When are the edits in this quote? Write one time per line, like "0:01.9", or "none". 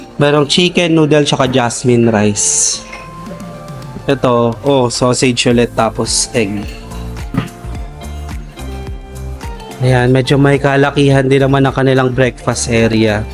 none

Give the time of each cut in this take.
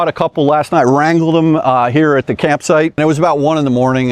0:03.0

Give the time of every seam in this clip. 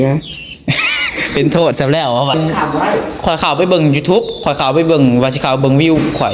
0:02.3

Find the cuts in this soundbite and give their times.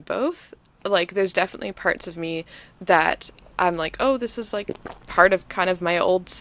none

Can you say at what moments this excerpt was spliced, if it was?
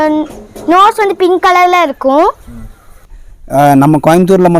0:03.0

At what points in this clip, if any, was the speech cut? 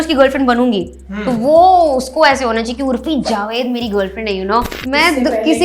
0:04.7

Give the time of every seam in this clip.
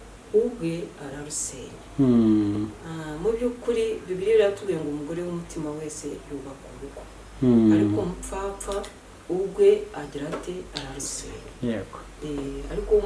none

